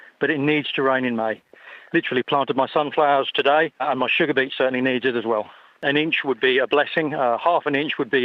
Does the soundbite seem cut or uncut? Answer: cut